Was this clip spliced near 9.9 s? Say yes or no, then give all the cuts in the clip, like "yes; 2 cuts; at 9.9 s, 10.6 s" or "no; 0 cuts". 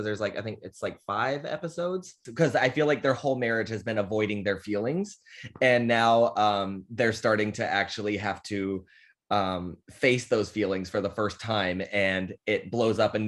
no; 1 cut; at 2.2 s